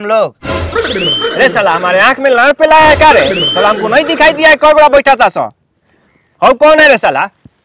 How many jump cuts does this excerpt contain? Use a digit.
0